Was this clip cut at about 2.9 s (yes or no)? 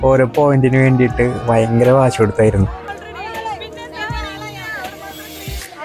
no